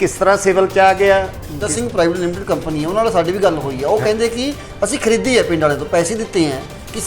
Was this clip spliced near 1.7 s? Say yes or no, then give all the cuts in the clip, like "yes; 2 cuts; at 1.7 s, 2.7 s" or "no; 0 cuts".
yes; 1 cut; at 1.7 s